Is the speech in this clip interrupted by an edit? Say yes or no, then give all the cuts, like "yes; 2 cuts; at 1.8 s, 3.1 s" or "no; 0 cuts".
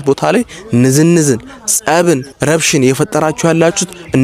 yes; 1 cut; at 2.3 s